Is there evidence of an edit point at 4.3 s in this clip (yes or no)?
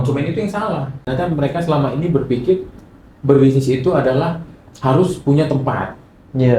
no